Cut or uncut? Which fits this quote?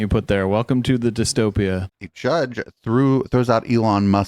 cut